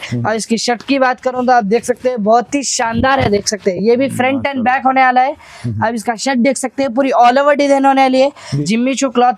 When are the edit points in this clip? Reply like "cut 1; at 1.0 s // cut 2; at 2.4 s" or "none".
cut 1; at 8.4 s